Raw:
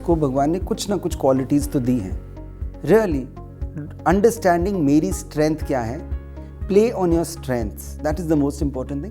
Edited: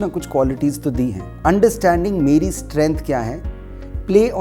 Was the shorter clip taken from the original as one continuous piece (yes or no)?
no